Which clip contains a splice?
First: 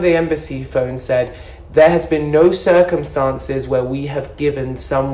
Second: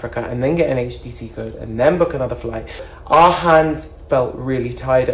second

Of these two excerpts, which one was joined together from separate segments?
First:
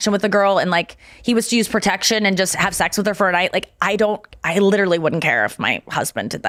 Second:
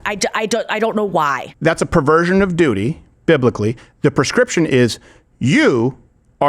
second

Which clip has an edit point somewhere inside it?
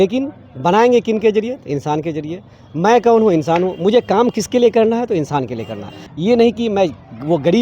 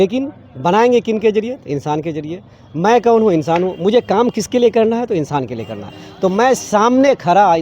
first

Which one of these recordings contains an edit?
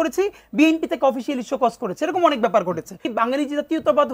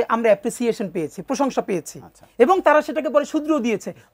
first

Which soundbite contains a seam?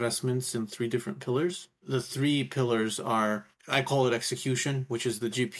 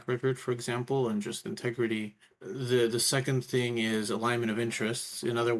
first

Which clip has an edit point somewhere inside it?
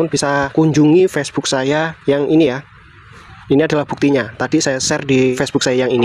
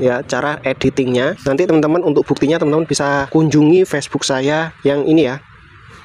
second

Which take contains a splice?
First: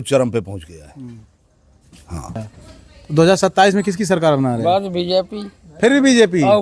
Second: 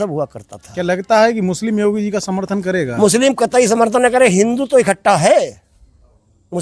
first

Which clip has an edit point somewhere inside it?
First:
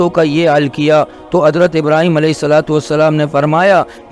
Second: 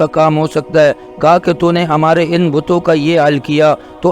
second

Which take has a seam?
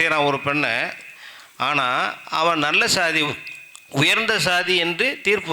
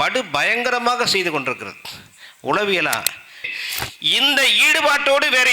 second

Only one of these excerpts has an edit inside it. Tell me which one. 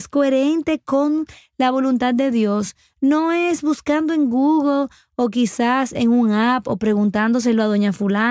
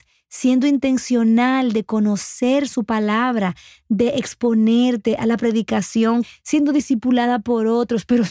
second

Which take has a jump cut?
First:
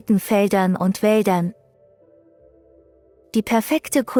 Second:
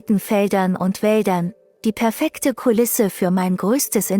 second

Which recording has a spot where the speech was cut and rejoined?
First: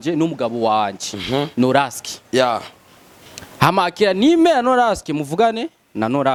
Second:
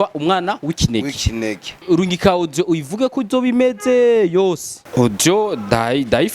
second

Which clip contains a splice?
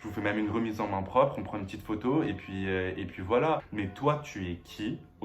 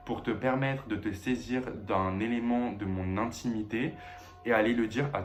first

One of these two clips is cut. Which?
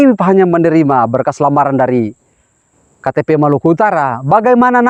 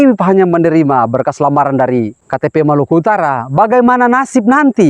second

